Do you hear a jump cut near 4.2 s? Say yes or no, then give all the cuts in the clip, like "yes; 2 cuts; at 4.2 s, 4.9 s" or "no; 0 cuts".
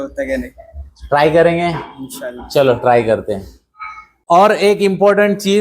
yes; 1 cut; at 4.2 s